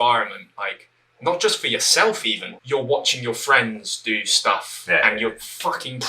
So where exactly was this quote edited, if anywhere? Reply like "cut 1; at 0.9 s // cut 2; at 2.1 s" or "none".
cut 1; at 2.5 s